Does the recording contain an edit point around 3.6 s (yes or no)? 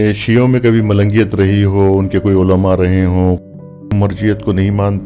yes